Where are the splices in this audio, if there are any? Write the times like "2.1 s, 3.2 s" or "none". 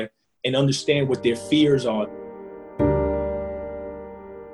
2.1 s